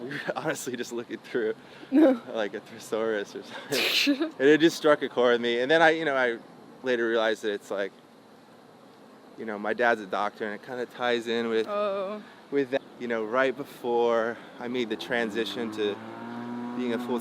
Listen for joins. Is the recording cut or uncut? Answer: cut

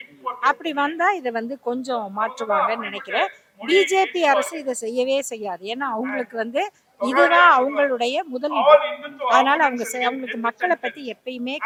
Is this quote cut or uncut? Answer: uncut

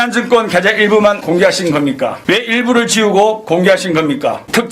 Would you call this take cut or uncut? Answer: cut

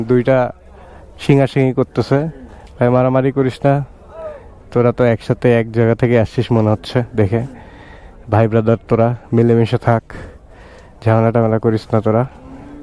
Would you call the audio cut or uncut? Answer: uncut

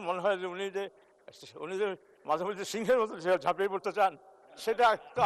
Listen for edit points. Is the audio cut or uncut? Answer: uncut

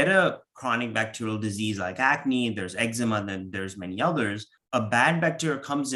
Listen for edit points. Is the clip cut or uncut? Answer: cut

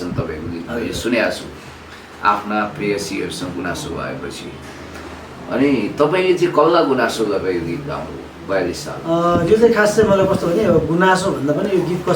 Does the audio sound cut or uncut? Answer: uncut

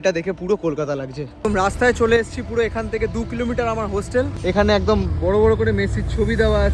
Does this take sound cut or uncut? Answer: cut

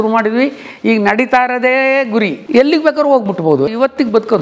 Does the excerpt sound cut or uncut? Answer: cut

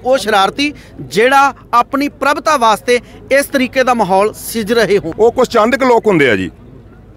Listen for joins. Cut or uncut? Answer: cut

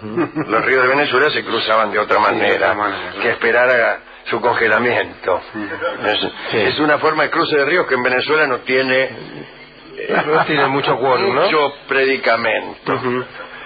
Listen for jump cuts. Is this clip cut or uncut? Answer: cut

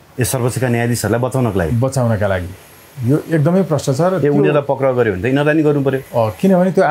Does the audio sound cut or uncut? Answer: uncut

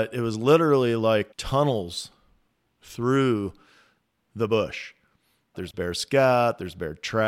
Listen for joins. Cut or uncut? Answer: cut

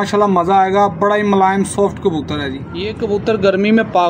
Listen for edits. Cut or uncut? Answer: cut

